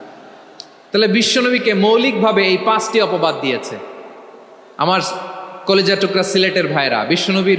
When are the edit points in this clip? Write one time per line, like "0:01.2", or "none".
none